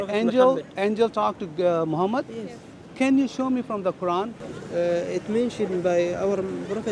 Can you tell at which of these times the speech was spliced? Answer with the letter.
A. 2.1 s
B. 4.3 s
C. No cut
B